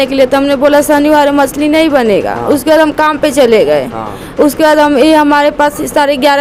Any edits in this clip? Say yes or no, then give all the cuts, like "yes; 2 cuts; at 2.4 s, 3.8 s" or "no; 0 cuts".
no; 0 cuts